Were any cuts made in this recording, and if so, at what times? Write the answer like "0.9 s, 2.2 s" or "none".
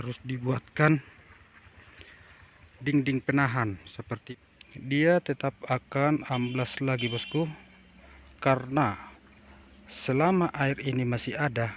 4.1 s